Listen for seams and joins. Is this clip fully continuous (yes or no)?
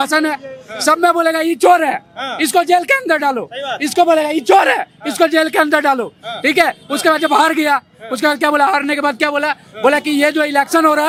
yes